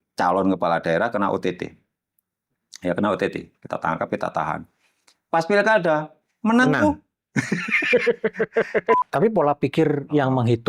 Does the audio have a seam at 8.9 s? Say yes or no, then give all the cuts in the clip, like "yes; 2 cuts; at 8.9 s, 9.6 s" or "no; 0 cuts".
yes; 1 cut; at 8.9 s